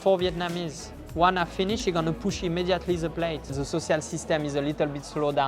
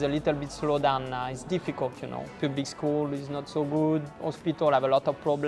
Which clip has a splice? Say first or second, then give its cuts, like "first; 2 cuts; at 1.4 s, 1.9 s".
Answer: first; 1 cut; at 3.6 s